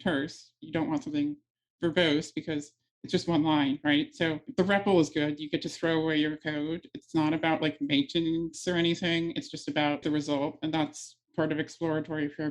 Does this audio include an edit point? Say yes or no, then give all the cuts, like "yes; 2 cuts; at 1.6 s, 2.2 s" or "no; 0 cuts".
yes; 2 cuts; at 4.5 s, 10.0 s